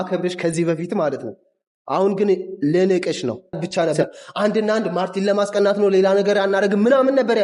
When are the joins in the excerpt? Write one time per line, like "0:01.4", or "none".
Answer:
0:03.6